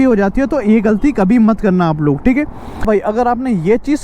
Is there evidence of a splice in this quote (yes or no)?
yes